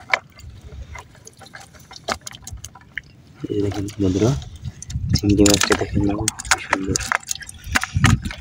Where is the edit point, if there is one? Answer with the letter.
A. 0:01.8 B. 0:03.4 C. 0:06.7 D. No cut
D